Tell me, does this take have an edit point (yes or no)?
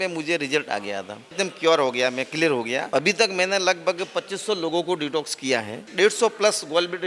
yes